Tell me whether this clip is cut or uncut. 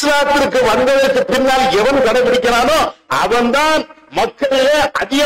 uncut